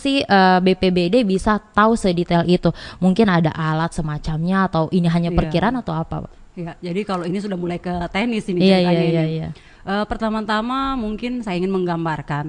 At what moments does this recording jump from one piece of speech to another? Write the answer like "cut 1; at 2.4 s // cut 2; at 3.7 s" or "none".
none